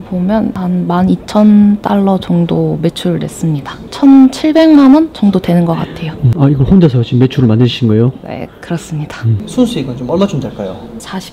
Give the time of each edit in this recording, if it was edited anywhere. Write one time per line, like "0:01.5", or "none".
0:03.8
0:06.2
0:09.4